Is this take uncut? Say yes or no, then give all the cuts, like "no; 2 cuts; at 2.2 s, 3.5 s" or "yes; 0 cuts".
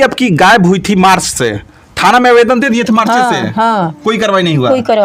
yes; 0 cuts